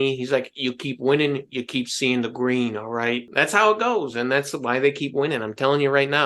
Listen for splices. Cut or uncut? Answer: cut